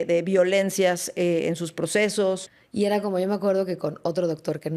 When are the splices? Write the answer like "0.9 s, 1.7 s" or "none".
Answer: 2.6 s